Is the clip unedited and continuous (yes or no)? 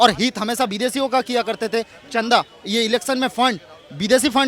yes